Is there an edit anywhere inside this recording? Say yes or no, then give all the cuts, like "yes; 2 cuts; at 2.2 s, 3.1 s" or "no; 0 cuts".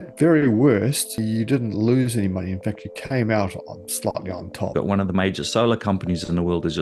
yes; 2 cuts; at 1.2 s, 4.7 s